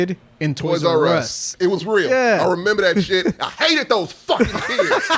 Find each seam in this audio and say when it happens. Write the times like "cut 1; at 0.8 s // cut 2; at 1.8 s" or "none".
cut 1; at 1.5 s

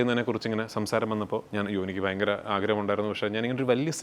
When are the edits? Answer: cut 1; at 1.5 s

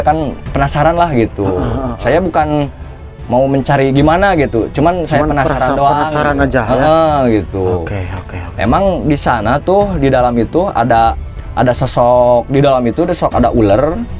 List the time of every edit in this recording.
none

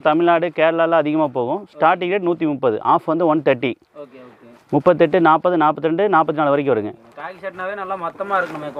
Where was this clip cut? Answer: none

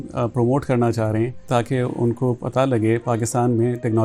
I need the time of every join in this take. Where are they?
cut 1; at 1.5 s

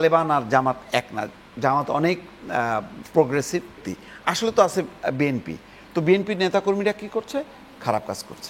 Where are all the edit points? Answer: cut 1; at 3.9 s

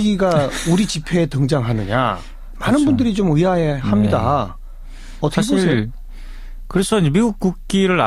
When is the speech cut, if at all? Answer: none

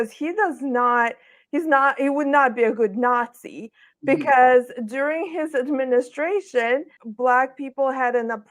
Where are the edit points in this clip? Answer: cut 1; at 7.0 s

